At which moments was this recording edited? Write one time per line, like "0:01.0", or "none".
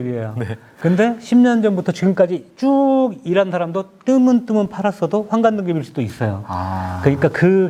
none